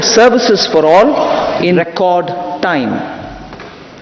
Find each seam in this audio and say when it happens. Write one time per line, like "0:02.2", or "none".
0:01.8